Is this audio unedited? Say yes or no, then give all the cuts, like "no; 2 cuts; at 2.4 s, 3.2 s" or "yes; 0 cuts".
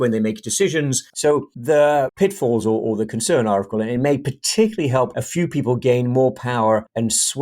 no; 2 cuts; at 1.3 s, 3.7 s